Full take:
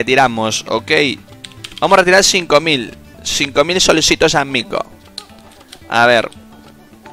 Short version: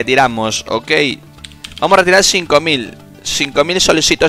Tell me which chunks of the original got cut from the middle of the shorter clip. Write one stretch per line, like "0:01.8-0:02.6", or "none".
none